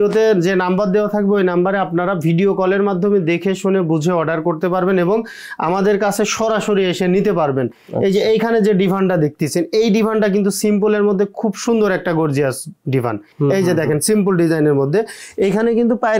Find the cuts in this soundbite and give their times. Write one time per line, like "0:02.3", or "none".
none

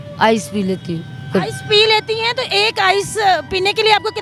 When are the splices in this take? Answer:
none

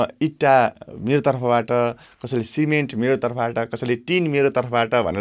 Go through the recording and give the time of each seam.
none

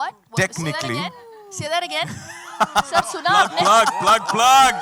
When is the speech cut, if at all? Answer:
none

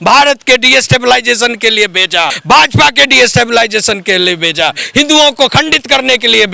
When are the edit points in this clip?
0:02.4

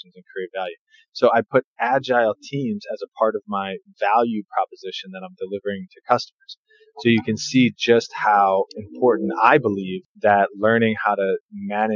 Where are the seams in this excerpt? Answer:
none

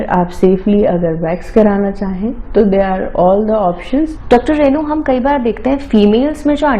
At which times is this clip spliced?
0:04.1

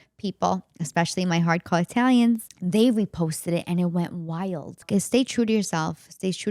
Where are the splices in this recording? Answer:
0:02.5
0:04.8

